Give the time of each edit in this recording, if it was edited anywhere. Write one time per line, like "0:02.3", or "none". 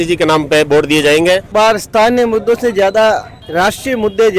0:01.5